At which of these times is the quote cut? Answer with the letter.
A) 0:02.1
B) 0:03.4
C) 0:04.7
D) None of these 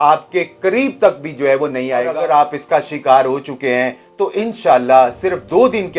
A